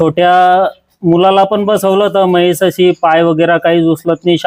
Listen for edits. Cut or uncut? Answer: uncut